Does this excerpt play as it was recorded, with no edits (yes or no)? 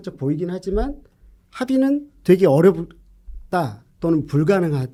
yes